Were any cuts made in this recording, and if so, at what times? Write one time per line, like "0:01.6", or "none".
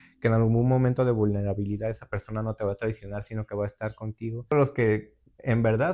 0:04.5